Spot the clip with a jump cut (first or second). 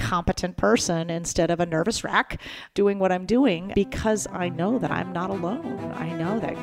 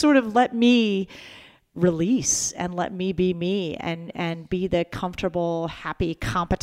first